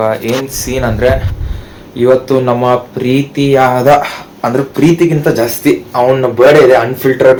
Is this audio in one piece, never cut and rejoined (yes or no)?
yes